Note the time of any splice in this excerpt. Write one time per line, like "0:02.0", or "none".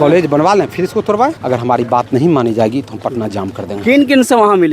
0:01.4